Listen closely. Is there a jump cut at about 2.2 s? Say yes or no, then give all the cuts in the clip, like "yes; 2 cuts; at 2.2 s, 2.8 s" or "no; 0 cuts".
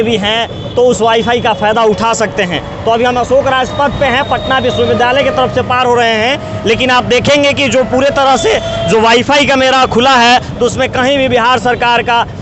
no; 0 cuts